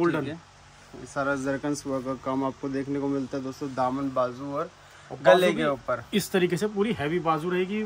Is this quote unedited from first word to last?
yes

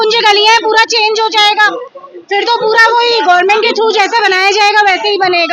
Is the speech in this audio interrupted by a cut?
no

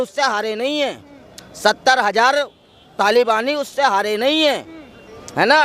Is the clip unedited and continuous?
yes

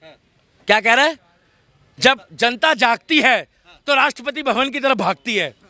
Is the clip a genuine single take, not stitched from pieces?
yes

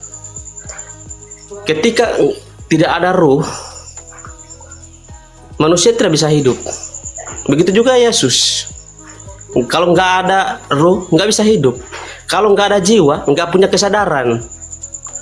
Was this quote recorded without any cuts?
yes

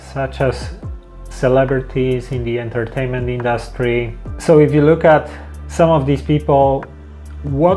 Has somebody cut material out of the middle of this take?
yes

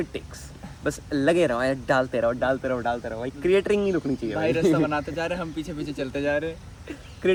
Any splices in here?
no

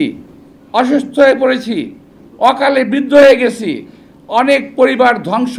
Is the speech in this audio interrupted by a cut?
no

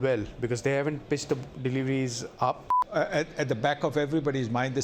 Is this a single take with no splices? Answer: no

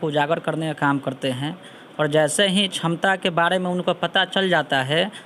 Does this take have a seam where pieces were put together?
no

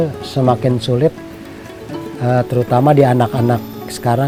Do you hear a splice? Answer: no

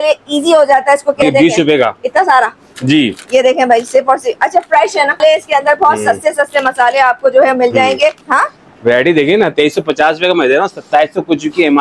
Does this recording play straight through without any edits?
no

